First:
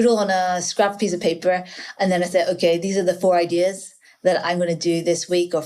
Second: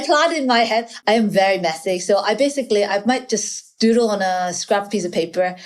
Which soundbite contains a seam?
second; 1 cut; at 0.9 s

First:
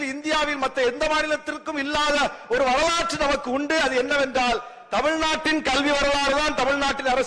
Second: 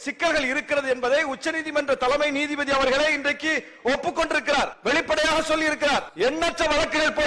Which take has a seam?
second; 2 cuts; at 4.8 s, 6.1 s

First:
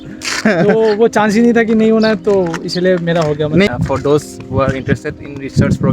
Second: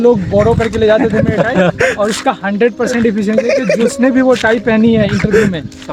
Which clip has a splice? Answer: first; 1 cut; at 3.7 s

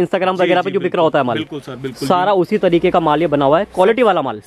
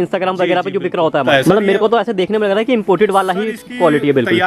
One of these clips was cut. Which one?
second; 1 cut; at 1.2 s

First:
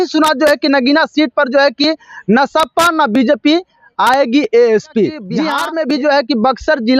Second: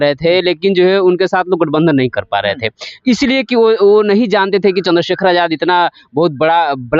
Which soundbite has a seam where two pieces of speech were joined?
first; 1 cut; at 5.5 s

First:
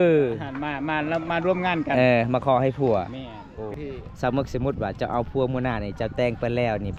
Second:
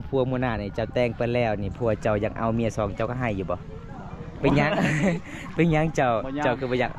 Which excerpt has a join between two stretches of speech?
first; 1 cut; at 3.8 s

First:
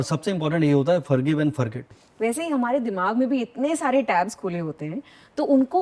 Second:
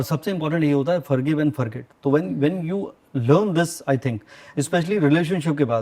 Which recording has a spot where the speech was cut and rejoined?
first; 1 cut; at 1.9 s

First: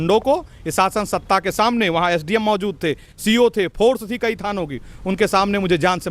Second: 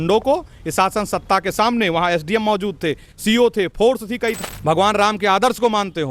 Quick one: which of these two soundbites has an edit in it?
second; 1 cut; at 4.4 s

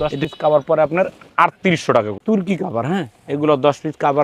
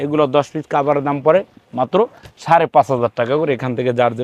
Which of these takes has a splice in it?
first; 1 cut; at 2.2 s

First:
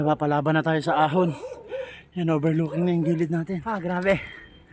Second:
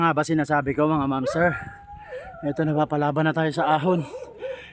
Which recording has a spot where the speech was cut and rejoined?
first; 1 cut; at 3.6 s

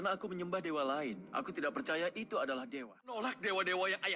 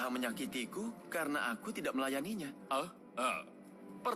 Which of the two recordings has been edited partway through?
first; 1 cut; at 3.1 s

